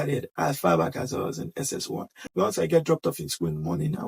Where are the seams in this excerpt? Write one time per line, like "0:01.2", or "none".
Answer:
0:02.3